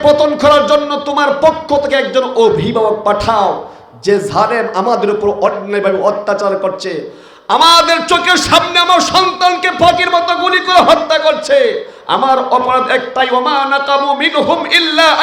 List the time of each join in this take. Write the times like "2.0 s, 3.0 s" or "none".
none